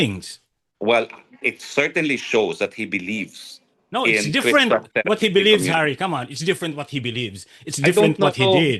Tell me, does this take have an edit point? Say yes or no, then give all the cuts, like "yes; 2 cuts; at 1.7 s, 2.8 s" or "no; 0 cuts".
no; 0 cuts